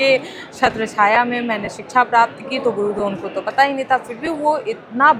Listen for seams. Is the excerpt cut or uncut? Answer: uncut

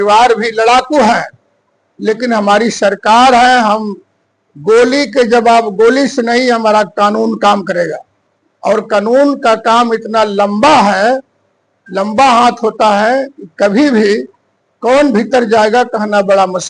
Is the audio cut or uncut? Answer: uncut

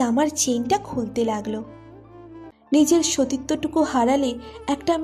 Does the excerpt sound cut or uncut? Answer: cut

